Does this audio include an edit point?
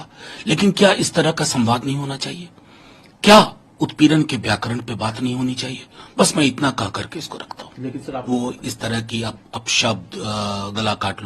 yes; 1 cut; at 8.2 s

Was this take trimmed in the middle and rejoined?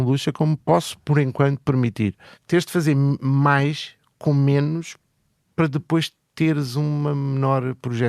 yes; 1 cut; at 2.3 s

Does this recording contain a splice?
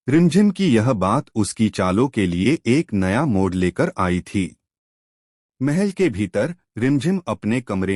no; 0 cuts

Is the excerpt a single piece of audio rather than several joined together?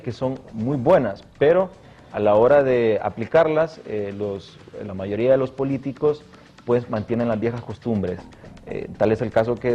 no; 1 cut; at 1.7 s

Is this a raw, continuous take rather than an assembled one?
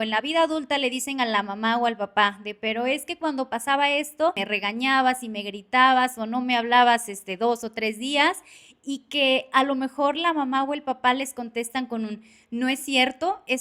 no; 1 cut; at 4.4 s

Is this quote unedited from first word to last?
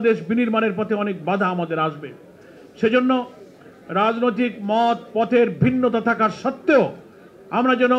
yes; 0 cuts

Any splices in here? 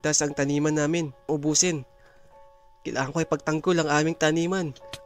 yes; 1 cut; at 1.3 s

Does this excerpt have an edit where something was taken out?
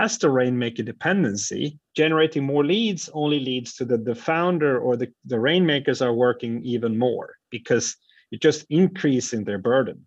yes; 1 cut; at 1.8 s

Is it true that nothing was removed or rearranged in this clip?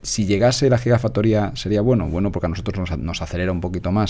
yes; 0 cuts

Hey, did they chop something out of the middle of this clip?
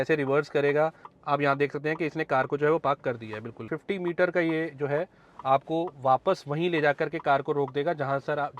yes; 2 cuts; at 1.1 s, 3.7 s

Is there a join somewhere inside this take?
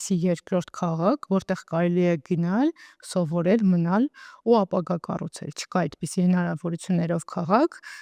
no; 0 cuts

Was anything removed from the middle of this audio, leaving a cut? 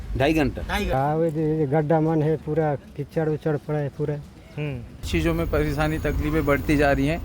yes; 2 cuts; at 0.9 s, 5.0 s

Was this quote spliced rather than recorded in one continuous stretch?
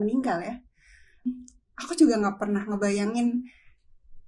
yes; 1 cut; at 1.3 s

